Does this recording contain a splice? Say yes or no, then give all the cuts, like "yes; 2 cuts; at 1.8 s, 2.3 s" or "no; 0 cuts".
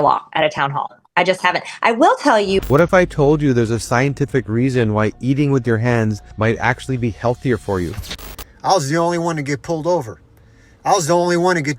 yes; 2 cuts; at 2.6 s, 8.0 s